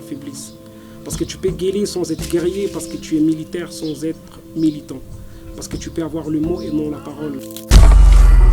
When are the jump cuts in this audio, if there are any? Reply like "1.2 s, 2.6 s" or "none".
7.6 s